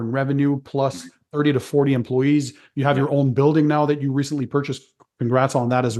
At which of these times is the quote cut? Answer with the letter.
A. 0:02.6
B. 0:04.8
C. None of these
C